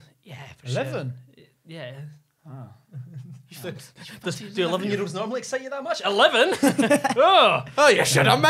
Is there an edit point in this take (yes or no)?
no